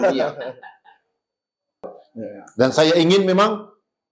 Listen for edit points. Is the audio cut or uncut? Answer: cut